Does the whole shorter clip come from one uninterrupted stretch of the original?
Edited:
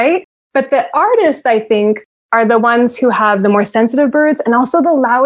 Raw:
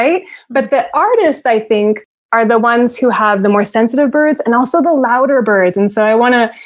yes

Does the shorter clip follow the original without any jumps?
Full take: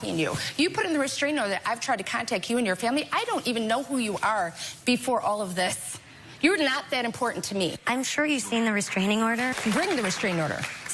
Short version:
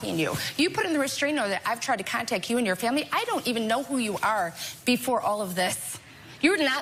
yes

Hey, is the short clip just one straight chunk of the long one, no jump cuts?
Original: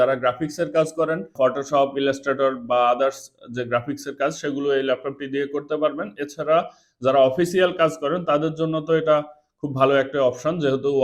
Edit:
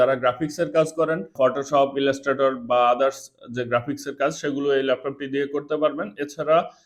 yes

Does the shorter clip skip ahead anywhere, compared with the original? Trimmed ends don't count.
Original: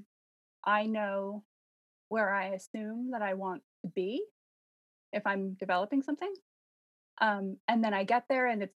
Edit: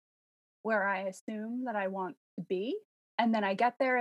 yes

